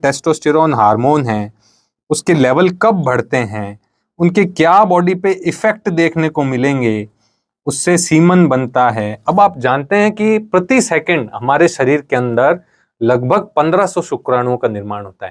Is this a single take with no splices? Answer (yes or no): yes